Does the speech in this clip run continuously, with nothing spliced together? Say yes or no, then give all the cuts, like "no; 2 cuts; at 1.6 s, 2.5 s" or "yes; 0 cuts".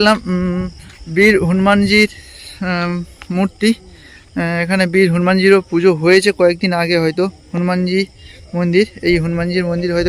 yes; 0 cuts